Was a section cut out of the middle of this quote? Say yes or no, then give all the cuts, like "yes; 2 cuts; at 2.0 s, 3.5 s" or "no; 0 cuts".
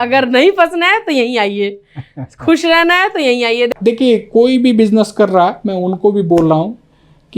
yes; 1 cut; at 3.7 s